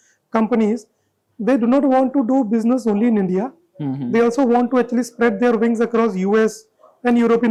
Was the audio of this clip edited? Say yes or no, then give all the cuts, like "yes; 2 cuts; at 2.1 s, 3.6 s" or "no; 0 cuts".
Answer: no; 0 cuts